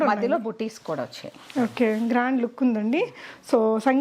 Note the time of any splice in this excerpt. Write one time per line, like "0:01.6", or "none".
none